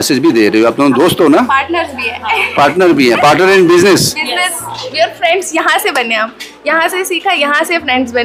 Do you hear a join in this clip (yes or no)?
no